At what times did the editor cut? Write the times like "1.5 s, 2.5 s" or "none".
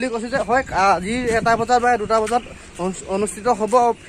none